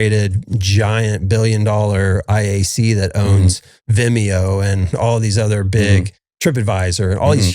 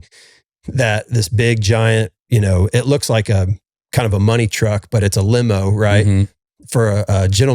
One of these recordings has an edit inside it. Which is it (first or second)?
first